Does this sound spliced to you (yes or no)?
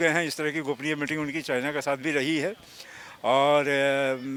no